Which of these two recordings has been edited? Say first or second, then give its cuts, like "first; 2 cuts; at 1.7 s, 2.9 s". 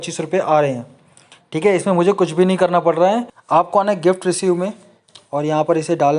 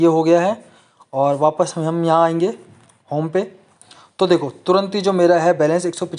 first; 1 cut; at 3.3 s